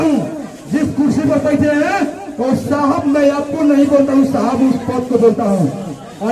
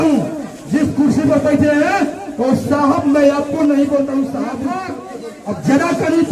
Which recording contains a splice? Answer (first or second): second